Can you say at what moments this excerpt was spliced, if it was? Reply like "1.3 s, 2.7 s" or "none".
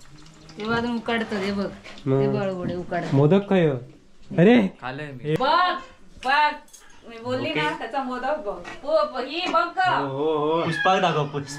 5.4 s